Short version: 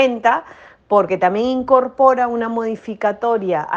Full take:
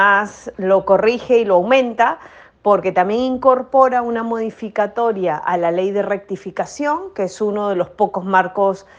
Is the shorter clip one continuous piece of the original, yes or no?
yes